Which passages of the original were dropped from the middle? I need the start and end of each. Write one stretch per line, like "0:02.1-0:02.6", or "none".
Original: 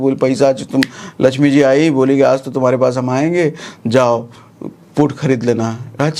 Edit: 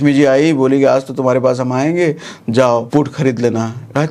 0:04.2-0:04.9

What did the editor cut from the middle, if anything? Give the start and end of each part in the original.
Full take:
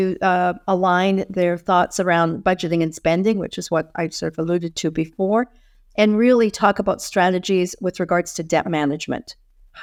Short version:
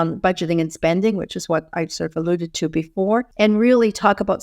0:05.5-0:05.9

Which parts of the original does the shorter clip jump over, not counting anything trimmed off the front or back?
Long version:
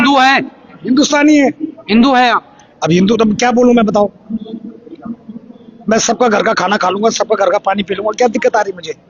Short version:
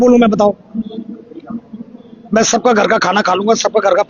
none

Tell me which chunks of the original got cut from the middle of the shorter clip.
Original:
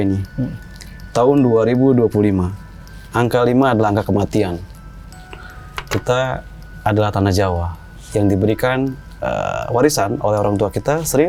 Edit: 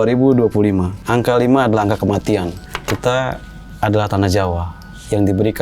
0:02.6-0:03.0
0:04.7-0:05.7

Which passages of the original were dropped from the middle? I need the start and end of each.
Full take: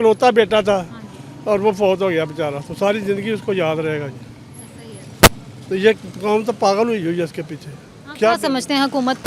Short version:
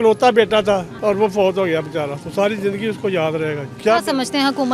0:00.9-0:01.4
0:04.1-0:08.0

